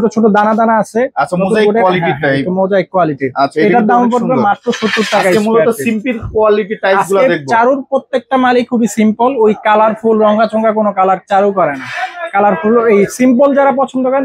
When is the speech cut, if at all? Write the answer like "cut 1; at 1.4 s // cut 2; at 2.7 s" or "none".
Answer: none